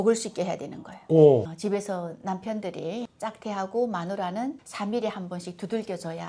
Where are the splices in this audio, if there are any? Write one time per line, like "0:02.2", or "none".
0:01.4